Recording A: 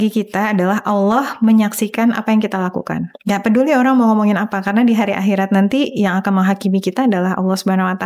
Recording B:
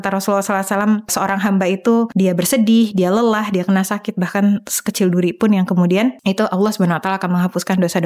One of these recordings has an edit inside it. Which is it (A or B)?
B